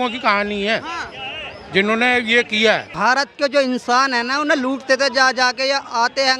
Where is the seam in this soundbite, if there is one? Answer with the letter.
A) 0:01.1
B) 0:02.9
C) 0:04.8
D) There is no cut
B